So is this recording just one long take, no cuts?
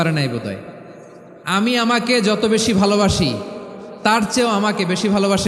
yes; 0 cuts

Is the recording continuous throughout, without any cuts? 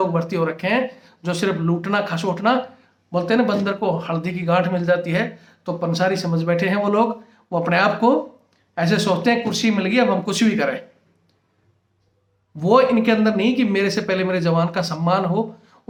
yes; 0 cuts

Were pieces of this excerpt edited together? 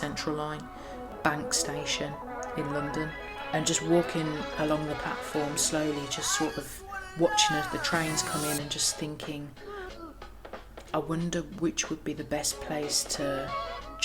yes; 1 cut; at 1.1 s

